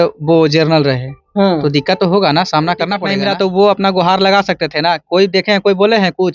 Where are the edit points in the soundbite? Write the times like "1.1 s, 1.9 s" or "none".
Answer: 3.1 s